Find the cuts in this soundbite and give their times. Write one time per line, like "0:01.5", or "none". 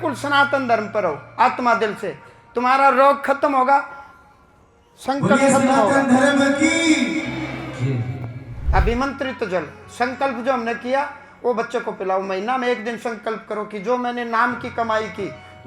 0:08.5